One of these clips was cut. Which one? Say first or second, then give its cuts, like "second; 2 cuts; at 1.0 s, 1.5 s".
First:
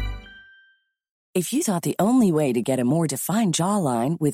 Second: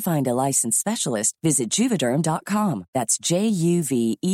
first; 1 cut; at 1.2 s